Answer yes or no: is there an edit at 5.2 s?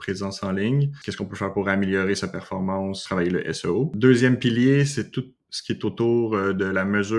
no